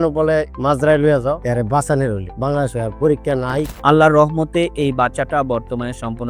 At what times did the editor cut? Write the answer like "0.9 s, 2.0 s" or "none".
1.4 s, 3.7 s

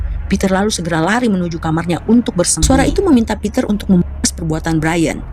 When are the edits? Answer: 2.6 s

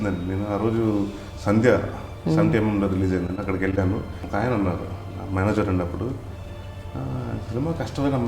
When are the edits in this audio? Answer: 1.3 s, 4.2 s

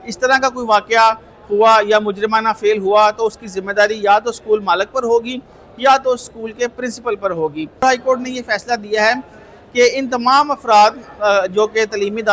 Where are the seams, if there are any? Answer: 7.8 s

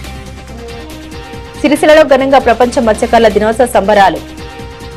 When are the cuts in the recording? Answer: none

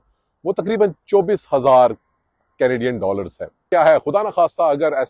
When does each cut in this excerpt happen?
3.6 s

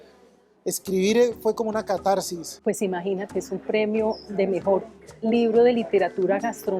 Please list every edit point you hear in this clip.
2.6 s

